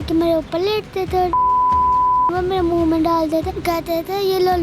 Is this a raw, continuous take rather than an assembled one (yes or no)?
no